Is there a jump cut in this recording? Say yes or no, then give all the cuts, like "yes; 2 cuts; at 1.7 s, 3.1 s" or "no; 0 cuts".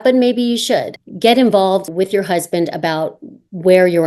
yes; 2 cuts; at 1.0 s, 1.9 s